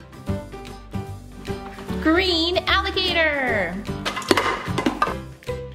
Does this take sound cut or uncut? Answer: uncut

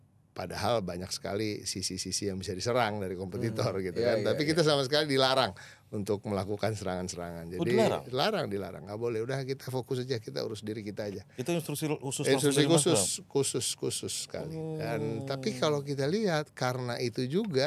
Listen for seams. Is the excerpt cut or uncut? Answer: uncut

